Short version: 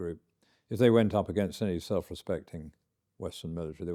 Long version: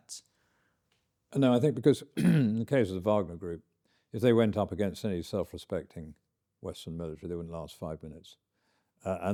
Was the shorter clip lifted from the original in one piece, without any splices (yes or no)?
yes